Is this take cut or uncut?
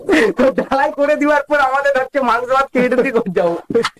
uncut